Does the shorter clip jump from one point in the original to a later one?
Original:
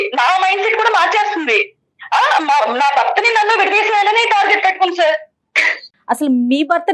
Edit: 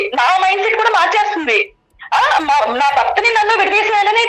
no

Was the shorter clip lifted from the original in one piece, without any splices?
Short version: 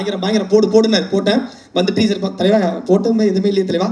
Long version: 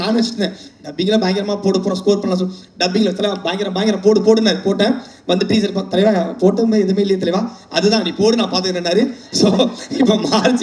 yes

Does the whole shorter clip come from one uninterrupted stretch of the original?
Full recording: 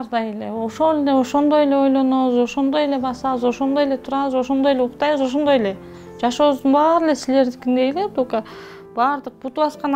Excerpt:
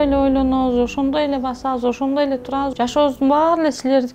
no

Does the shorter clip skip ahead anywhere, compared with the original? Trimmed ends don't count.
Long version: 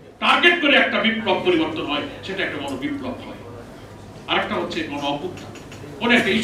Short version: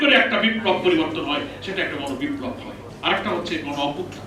yes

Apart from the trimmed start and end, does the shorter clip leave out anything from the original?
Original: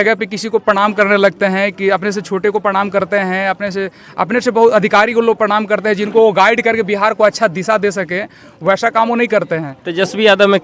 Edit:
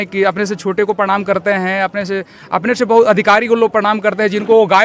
no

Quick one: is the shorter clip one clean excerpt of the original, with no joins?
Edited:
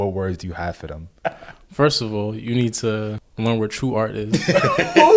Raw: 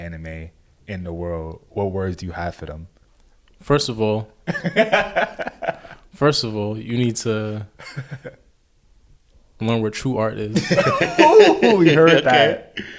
no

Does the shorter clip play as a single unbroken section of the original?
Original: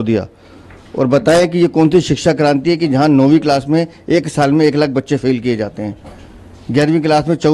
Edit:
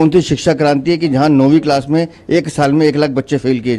yes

